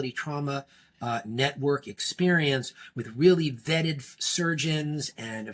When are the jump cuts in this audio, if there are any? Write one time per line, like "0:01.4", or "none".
none